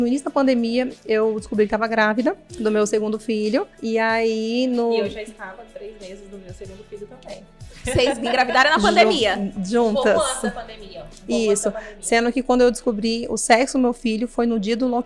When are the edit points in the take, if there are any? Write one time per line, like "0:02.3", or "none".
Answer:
0:02.5
0:03.7

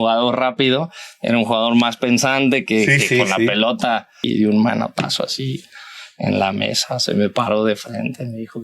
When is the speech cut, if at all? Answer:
0:04.2

